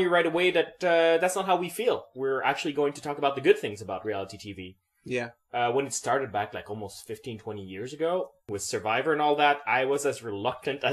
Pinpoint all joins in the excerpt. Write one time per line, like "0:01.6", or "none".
none